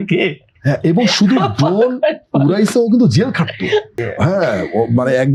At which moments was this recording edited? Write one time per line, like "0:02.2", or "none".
none